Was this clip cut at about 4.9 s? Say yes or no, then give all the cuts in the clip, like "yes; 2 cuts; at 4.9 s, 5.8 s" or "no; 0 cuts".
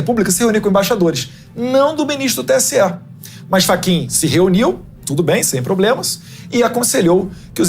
no; 0 cuts